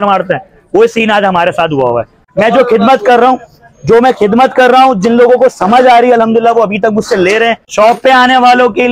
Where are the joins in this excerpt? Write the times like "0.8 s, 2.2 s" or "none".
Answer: 2.2 s, 7.6 s